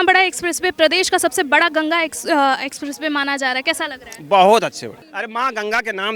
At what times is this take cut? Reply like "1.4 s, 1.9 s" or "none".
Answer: none

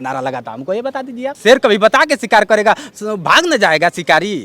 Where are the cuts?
1.3 s

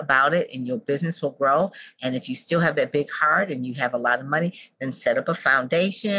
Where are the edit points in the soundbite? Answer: none

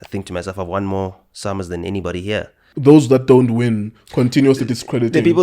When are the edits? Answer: 2.7 s

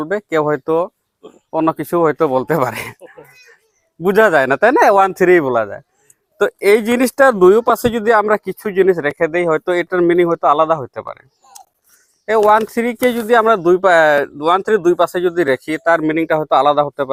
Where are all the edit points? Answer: none

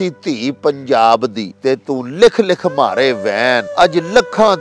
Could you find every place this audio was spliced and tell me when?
1.5 s, 3.7 s

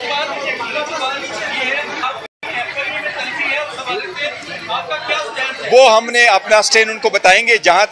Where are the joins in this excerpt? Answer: 2.3 s

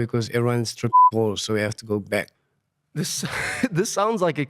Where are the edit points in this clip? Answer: 2.4 s

